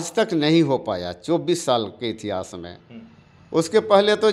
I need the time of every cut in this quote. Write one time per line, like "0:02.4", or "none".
none